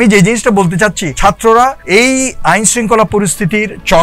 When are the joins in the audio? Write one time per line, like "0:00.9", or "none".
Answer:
0:01.1
0:01.8